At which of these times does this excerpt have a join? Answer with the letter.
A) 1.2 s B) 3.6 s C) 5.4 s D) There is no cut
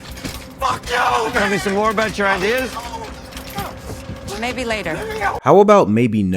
C